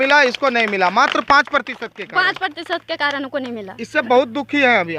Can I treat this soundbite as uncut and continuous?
yes; 0 cuts

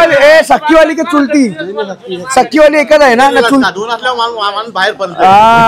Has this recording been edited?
yes; 1 cut; at 3.7 s

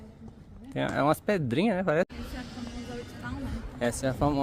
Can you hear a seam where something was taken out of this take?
yes; 1 cut; at 2.1 s

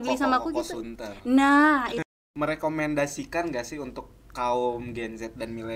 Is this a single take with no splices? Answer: no; 1 cut; at 2.0 s

